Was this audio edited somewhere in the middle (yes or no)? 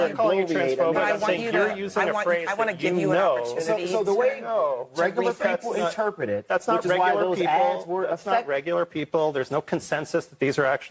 no